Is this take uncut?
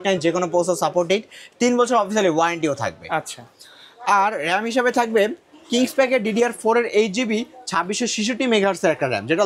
yes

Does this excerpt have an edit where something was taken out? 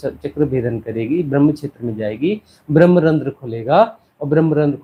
no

